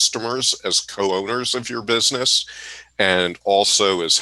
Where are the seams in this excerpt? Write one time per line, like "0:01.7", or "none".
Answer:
none